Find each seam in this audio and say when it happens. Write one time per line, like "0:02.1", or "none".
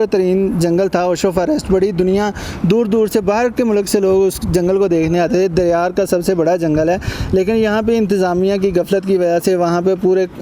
none